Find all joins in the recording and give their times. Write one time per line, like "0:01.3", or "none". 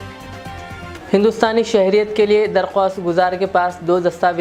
0:00.9